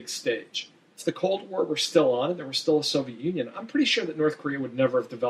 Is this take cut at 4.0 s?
no; 1 cut; at 1.0 s

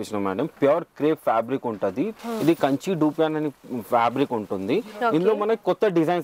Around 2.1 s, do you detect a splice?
yes; 1 cut; at 2.1 s

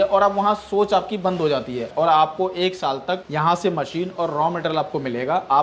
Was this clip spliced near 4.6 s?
no; 2 cuts; at 1.9 s, 3.3 s

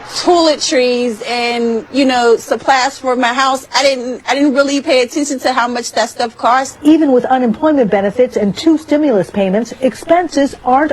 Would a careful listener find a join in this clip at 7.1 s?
yes; 1 cut; at 7.1 s

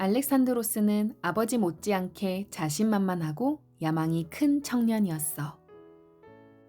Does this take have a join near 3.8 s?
no; 1 cut; at 5.6 s

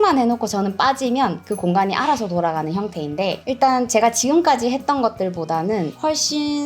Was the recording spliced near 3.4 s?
yes; 1 cut; at 3.4 s

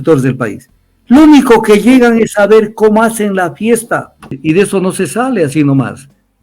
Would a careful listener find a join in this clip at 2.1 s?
no; 1 cut; at 4.4 s

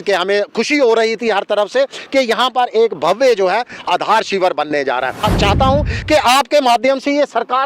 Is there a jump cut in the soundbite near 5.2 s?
yes; 1 cut; at 5.2 s

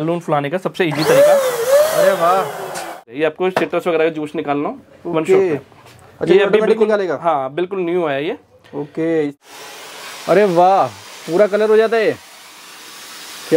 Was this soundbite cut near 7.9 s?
no; 2 cuts; at 3.0 s, 9.3 s

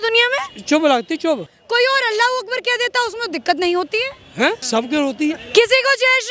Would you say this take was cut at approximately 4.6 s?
yes; 2 cuts; at 1.5 s, 4.6 s

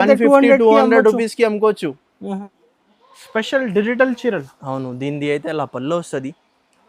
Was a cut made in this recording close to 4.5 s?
no; 1 cut; at 2.4 s

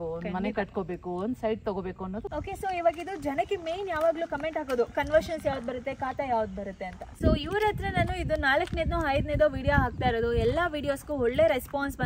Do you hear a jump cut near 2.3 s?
yes; 2 cuts; at 2.3 s, 7.0 s

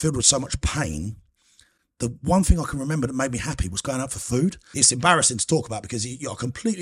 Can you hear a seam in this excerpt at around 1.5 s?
no; 1 cut; at 4.7 s

